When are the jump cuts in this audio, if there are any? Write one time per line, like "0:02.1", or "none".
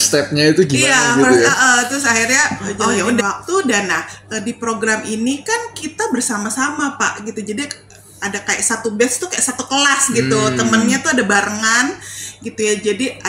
0:03.2